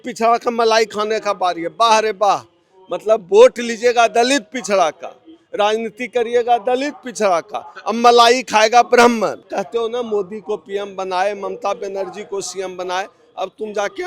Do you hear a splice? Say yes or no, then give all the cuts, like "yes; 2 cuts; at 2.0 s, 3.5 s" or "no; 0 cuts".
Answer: yes; 1 cut; at 9.5 s